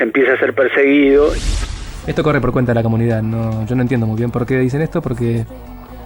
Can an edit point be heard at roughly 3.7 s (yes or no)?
no